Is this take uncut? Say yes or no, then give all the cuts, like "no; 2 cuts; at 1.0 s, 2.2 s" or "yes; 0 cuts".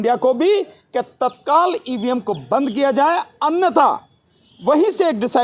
yes; 0 cuts